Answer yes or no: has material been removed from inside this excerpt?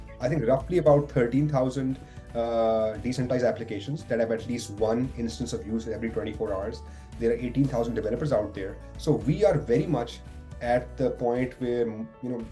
no